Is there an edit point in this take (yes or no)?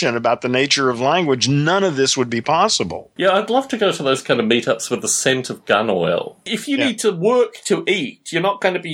yes